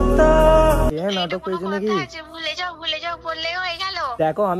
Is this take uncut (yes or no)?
no